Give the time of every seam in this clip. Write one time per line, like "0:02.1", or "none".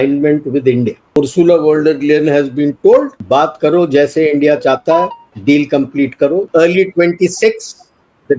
0:01.2
0:03.2
0:05.2
0:06.5

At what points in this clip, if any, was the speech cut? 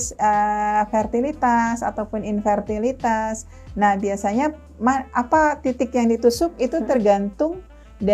none

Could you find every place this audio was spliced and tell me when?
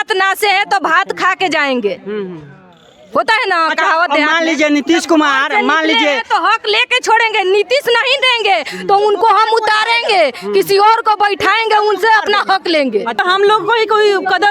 0:13.2

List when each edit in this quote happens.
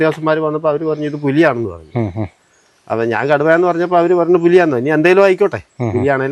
none

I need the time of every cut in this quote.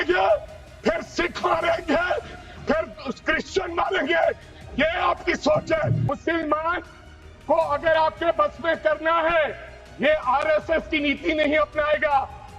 0:06.1

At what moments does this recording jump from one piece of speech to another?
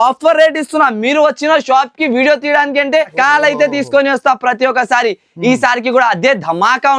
0:03.1

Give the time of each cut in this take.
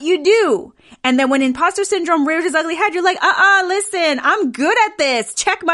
none

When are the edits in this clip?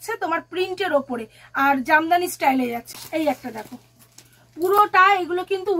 0:02.9

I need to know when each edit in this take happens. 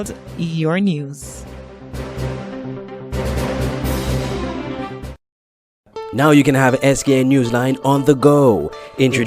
0:05.8

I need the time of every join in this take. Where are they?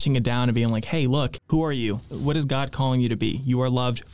0:01.4
0:02.1

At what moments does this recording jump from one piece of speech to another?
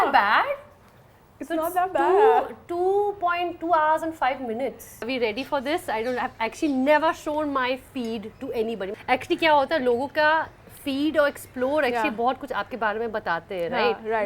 0:05.1
0:08.9

